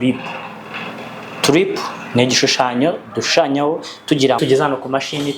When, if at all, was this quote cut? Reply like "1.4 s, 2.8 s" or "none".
4.4 s

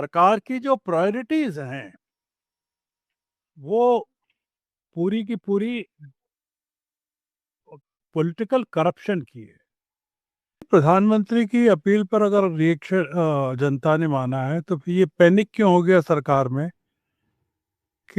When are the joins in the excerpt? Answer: 10.7 s

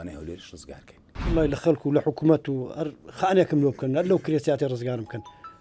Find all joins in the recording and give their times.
1.1 s

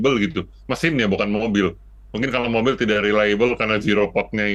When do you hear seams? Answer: none

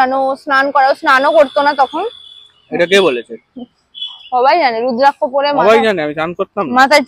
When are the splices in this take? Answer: none

